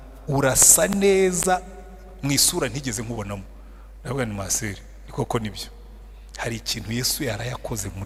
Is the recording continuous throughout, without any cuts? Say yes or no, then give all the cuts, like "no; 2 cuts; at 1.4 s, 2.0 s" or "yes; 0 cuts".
yes; 0 cuts